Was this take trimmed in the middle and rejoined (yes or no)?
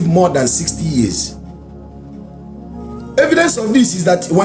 no